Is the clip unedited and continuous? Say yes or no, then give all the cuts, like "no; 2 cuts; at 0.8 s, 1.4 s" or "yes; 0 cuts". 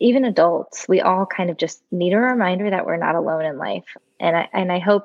no; 1 cut; at 3.9 s